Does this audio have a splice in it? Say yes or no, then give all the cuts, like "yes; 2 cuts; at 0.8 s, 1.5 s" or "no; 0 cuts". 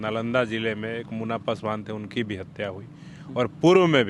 no; 0 cuts